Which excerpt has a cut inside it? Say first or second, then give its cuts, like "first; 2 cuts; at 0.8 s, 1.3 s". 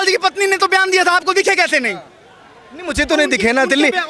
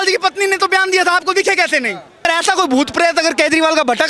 second; 1 cut; at 2.3 s